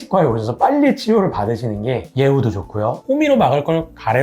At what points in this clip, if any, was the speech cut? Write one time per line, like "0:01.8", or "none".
0:03.0